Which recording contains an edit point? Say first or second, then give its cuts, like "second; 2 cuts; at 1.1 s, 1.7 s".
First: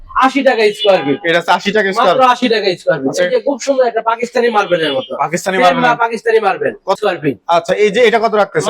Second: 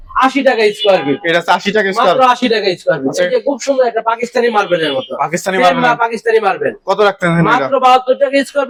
first; 1 cut; at 7.0 s